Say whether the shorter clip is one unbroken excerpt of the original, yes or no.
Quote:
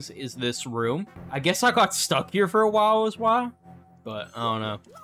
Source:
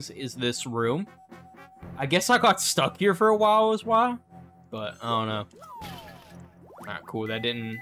no